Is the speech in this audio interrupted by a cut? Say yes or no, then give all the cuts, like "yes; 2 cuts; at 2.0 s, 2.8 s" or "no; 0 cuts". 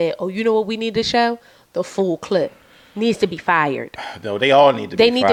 no; 0 cuts